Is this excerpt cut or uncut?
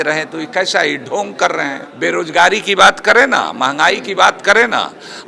cut